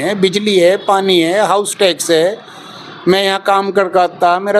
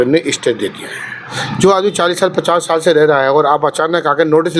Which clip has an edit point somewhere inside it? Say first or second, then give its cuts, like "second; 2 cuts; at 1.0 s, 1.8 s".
second; 1 cut; at 1.4 s